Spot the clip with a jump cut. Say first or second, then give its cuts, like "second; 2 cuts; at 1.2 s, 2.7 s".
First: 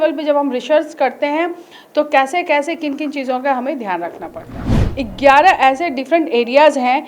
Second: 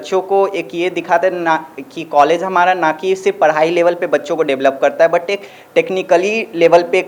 first; 1 cut; at 4.6 s